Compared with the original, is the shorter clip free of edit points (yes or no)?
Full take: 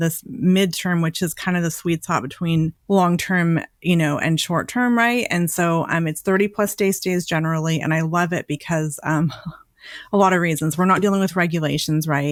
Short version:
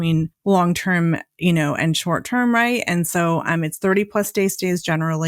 yes